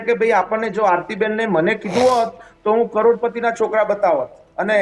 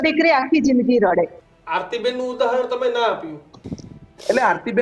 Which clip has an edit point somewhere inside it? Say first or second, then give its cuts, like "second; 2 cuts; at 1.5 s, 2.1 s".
second; 1 cut; at 1.4 s